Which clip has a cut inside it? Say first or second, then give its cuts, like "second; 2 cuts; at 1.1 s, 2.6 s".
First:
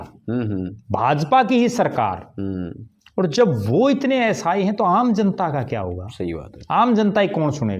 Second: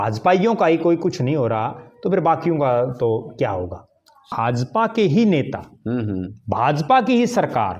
second; 1 cut; at 4.2 s